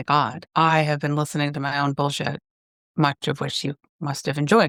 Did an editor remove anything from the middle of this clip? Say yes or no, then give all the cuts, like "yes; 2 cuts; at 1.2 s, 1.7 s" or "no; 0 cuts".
no; 0 cuts